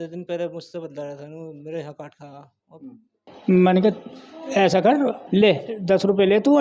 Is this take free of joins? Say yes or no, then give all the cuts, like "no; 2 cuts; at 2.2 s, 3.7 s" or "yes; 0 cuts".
no; 2 cuts; at 3.3 s, 5.2 s